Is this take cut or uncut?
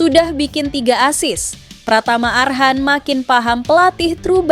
uncut